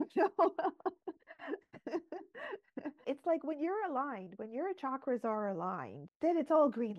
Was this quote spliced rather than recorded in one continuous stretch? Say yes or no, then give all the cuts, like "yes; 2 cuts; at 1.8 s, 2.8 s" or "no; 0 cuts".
yes; 1 cut; at 3.0 s